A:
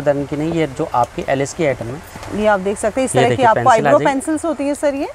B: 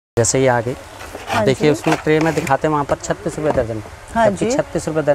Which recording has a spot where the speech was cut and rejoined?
A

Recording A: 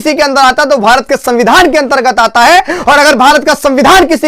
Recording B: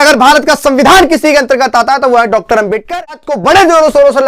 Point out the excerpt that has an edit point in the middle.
B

